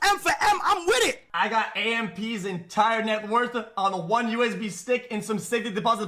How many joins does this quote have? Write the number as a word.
one